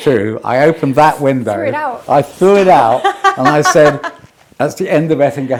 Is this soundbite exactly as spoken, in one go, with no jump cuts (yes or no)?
yes